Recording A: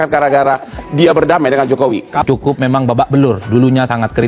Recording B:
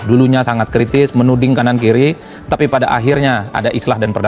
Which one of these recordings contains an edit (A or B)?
A